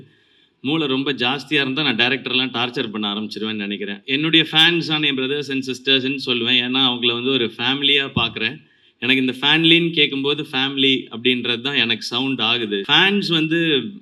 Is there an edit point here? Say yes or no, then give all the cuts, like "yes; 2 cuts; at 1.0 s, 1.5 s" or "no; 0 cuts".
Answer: yes; 2 cuts; at 4.0 s, 12.9 s